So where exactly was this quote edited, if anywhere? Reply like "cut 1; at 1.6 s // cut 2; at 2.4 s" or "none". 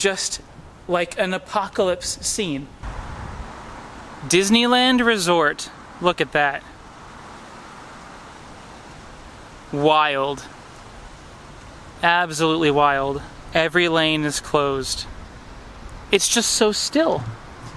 cut 1; at 2.8 s